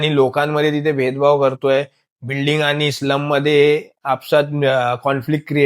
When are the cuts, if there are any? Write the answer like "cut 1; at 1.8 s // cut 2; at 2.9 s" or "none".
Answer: none

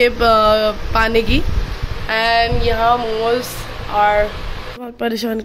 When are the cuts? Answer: cut 1; at 4.4 s

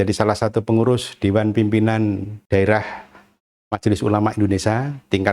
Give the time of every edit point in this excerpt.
cut 1; at 2.3 s

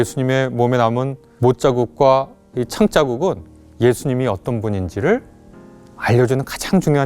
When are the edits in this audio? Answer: cut 1; at 1.2 s

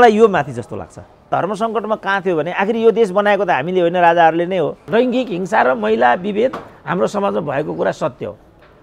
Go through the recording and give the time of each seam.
cut 1; at 1.3 s // cut 2; at 4.8 s

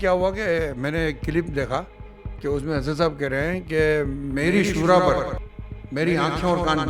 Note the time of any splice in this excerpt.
none

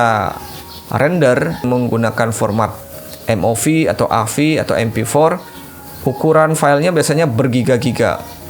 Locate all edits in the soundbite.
cut 1; at 1.6 s

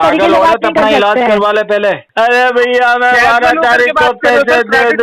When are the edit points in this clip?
cut 1; at 2.1 s

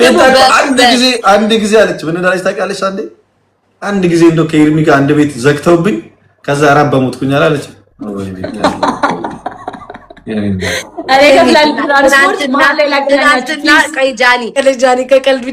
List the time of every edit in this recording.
cut 1; at 14.6 s

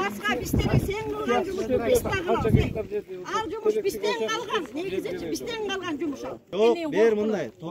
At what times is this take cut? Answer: cut 1; at 6.5 s

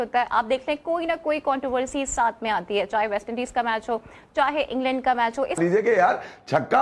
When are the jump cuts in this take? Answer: cut 1; at 5.6 s

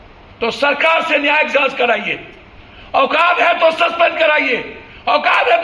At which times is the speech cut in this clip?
none

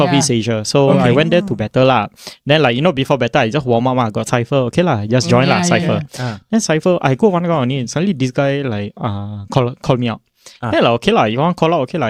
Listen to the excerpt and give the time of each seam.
none

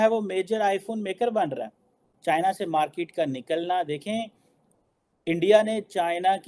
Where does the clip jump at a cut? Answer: cut 1; at 2.0 s

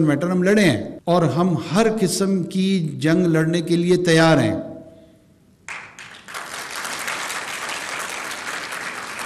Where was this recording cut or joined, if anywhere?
cut 1; at 0.9 s

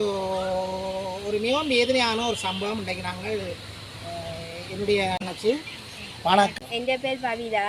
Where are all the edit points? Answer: cut 1; at 5.2 s // cut 2; at 6.7 s

